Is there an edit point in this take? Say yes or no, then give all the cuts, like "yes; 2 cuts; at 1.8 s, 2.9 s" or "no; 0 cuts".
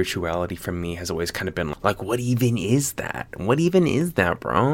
yes; 1 cut; at 1.7 s